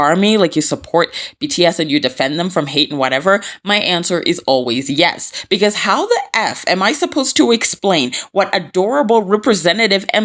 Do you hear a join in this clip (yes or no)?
no